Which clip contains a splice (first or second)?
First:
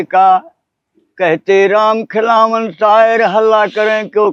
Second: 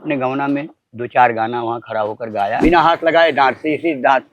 second